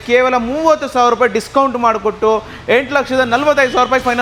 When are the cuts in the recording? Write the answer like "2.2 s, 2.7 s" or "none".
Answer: none